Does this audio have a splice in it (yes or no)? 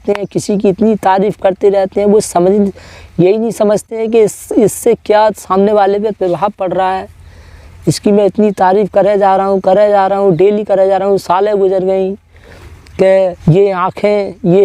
yes